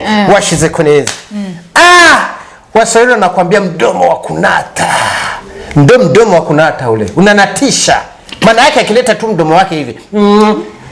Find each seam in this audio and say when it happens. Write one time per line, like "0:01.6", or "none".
none

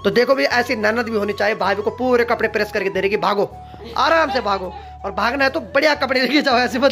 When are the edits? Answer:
none

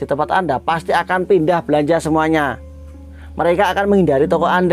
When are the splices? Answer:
none

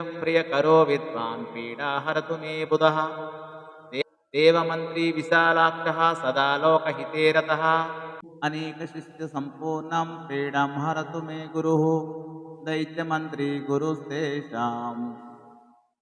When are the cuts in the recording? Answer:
0:08.2

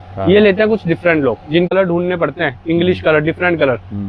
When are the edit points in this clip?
0:01.7

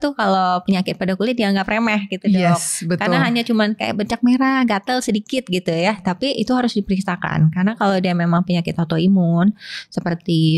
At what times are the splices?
none

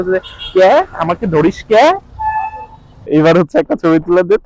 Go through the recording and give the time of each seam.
0:03.1

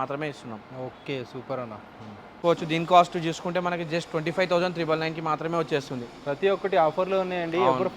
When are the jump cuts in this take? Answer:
0:02.4

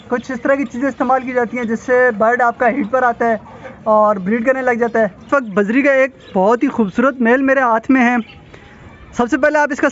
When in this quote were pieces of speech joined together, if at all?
0:05.3

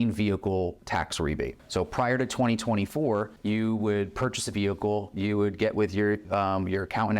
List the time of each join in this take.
0:01.1
0:03.3

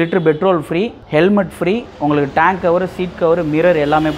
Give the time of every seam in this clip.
none

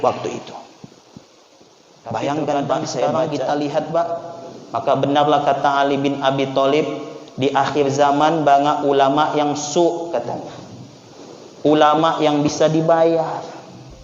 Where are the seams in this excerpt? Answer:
0:03.3

